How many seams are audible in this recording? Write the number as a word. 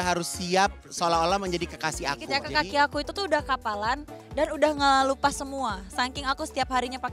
one